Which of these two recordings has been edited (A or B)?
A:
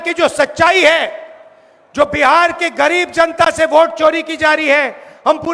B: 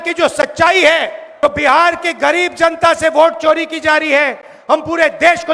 B